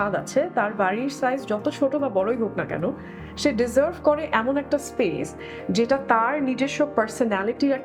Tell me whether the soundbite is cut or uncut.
uncut